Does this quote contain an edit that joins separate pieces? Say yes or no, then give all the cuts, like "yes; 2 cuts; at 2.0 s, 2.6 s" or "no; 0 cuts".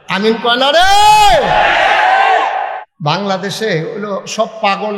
yes; 1 cut; at 2.8 s